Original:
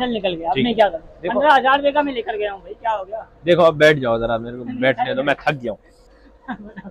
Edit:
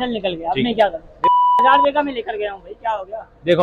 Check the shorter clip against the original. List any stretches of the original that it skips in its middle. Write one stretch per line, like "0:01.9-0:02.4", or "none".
none